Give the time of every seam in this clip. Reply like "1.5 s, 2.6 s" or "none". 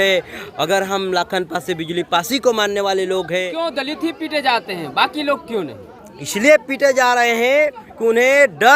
3.5 s